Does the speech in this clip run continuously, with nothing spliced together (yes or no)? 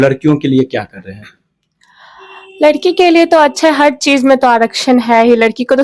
yes